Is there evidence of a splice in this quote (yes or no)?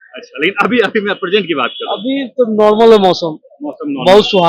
no